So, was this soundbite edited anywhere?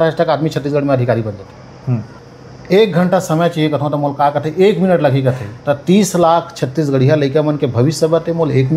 yes; 1 cut; at 2.2 s

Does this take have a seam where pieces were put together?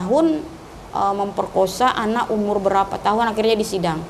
no; 0 cuts

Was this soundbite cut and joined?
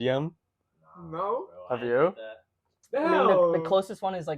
no; 0 cuts

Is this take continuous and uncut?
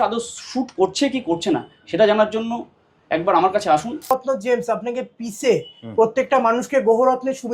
no; 1 cut; at 4.1 s

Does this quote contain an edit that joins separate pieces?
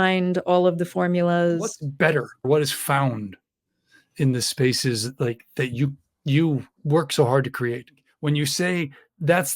no; 0 cuts

